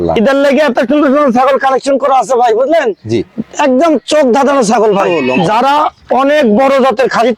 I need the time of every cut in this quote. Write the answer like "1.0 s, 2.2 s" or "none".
5.1 s